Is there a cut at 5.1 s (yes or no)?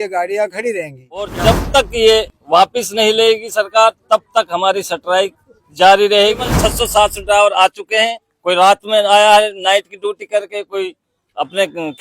no